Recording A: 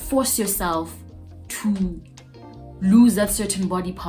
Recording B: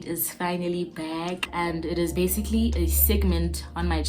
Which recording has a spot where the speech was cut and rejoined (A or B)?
B